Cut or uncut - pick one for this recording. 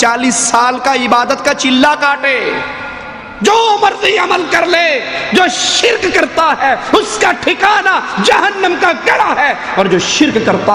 uncut